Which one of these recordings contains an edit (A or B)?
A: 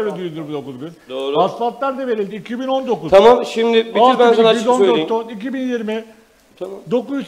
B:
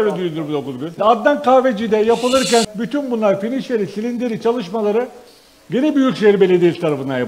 B